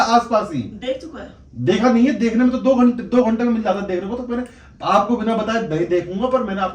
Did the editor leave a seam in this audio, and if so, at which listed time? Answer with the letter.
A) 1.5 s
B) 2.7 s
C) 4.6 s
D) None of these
D